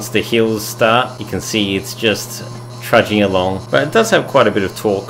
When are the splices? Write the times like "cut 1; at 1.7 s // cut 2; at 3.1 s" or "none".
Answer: cut 1; at 1.2 s // cut 2; at 3.6 s